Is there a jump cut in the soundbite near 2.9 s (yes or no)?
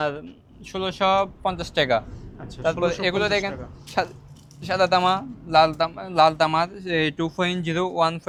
no